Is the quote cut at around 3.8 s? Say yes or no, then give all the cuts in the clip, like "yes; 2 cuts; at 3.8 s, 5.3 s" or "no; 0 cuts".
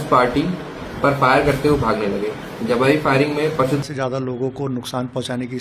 yes; 1 cut; at 3.8 s